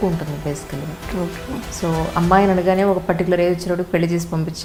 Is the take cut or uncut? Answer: uncut